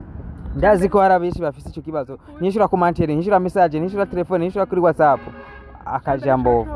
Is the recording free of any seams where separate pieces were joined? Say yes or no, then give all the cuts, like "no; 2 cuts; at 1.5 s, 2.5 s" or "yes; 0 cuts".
yes; 0 cuts